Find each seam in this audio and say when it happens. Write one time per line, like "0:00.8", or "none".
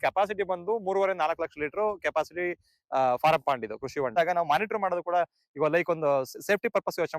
0:04.1